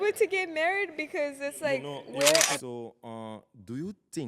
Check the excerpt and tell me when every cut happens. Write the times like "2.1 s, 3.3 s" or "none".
2.6 s

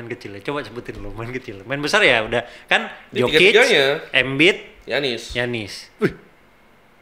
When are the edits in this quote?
none

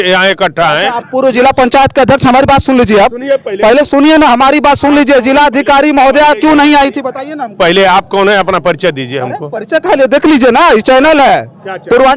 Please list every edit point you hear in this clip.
none

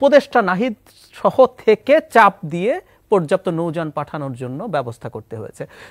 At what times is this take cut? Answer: none

